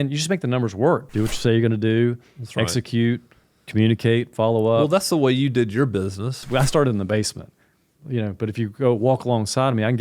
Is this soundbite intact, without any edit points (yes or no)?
no